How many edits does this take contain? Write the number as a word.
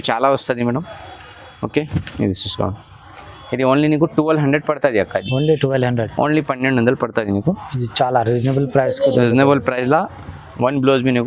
zero